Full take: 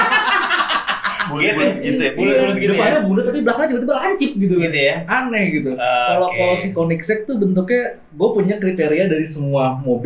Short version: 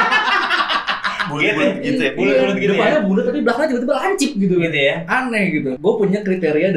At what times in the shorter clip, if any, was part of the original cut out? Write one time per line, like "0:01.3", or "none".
0:05.7